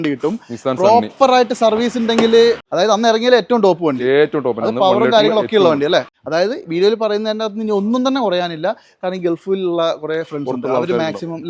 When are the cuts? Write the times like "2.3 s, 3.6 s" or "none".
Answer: 2.7 s, 6.2 s